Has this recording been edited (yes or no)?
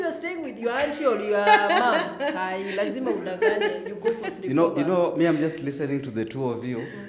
no